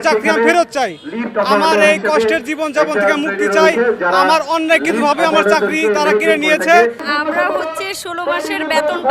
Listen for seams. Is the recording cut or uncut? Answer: uncut